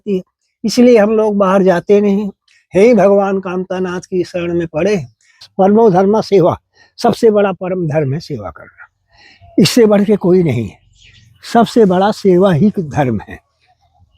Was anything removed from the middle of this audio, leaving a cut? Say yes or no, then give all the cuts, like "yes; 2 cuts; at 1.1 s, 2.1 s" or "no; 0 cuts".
yes; 1 cut; at 5.4 s